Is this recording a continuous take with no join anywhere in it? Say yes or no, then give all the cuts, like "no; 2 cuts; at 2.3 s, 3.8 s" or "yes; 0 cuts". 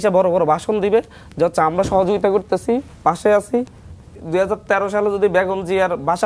no; 1 cut; at 4.1 s